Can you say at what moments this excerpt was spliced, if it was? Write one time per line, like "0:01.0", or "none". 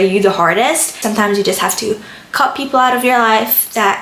0:00.9